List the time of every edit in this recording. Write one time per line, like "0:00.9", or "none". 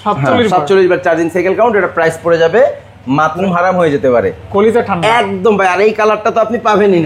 0:03.3